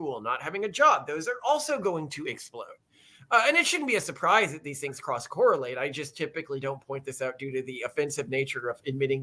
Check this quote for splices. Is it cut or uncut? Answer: uncut